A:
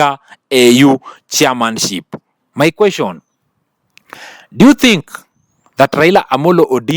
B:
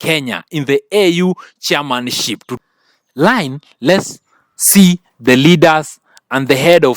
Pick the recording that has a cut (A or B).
B